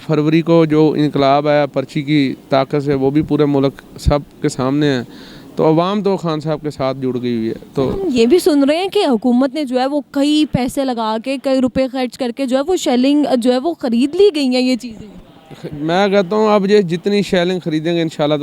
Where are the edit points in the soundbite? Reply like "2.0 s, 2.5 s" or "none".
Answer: none